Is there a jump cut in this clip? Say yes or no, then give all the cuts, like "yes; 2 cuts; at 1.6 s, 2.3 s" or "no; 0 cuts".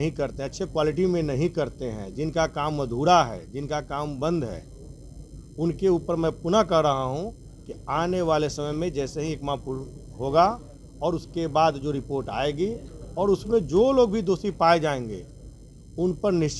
no; 0 cuts